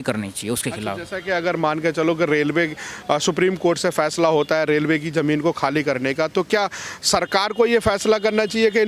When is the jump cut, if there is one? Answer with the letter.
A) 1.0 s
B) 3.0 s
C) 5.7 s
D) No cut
D